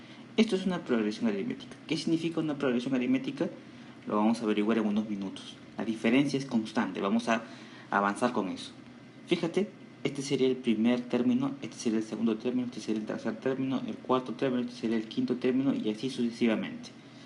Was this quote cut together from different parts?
no; 0 cuts

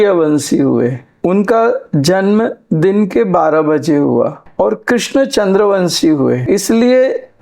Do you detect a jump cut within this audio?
yes; 2 cuts; at 4.4 s, 6.4 s

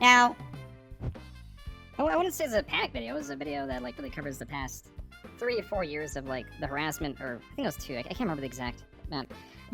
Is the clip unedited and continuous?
yes; 0 cuts

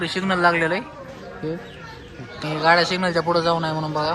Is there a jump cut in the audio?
yes; 1 cut; at 2.4 s

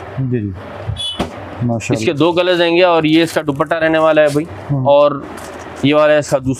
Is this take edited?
no; 0 cuts

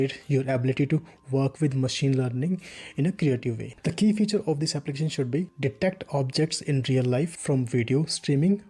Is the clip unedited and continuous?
no; 1 cut; at 3.7 s

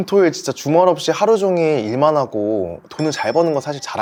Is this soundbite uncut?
yes; 0 cuts

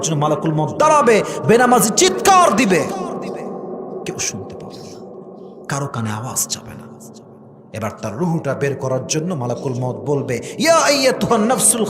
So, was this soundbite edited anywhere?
no; 0 cuts

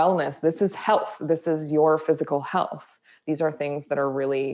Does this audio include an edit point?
no; 0 cuts

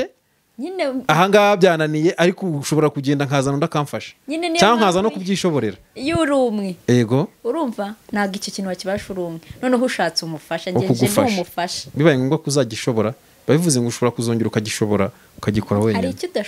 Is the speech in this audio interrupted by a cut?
no; 0 cuts

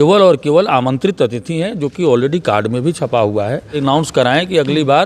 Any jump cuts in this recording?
yes; 1 cut; at 3.8 s

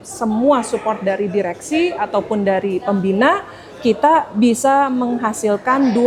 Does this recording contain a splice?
no; 0 cuts

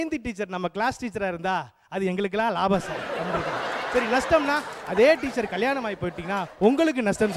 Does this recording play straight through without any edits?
yes; 0 cuts

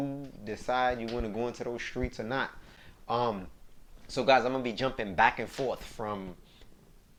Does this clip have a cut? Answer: no; 0 cuts

